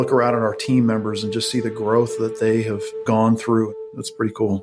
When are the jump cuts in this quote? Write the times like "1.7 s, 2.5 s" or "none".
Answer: 2.9 s, 3.7 s

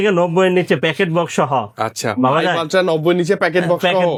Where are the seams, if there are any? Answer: none

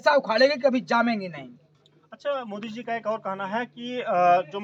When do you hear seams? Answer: none

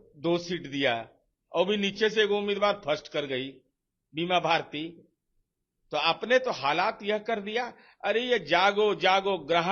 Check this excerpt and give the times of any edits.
none

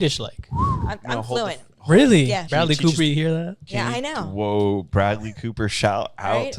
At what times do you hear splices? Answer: 2.5 s

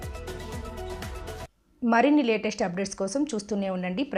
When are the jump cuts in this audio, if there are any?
none

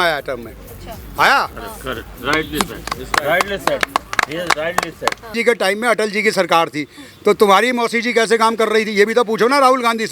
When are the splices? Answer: 5.3 s

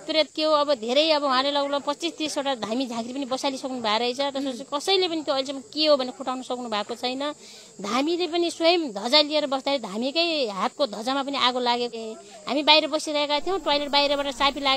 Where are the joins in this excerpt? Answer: 11.9 s

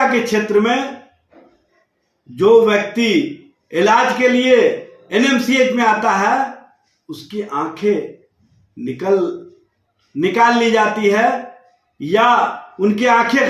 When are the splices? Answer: none

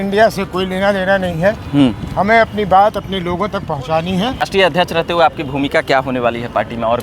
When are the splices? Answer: 4.4 s

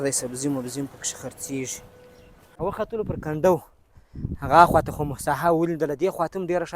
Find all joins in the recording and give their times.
2.6 s

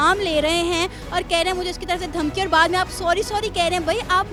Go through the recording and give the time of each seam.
none

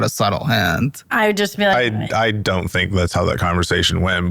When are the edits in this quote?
none

